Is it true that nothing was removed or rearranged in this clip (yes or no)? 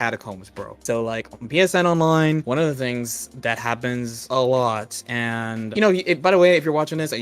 no